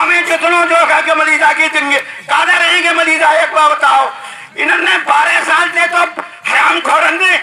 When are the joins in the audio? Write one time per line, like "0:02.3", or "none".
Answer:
none

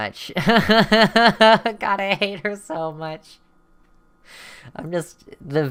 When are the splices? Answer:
none

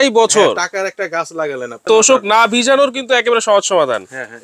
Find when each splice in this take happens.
0:01.8

